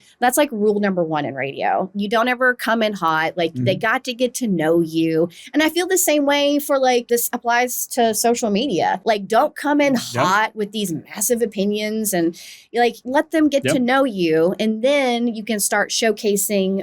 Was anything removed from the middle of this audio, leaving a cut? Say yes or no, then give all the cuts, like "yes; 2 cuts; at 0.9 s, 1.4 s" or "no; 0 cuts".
yes; 3 cuts; at 7.1 s, 9.0 s, 13.0 s